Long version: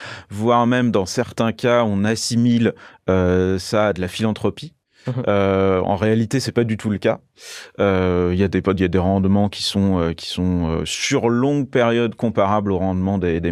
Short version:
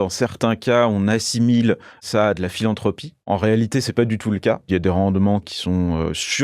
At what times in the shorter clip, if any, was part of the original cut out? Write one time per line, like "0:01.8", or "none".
0:02.0
0:03.3
0:04.7
0:05.5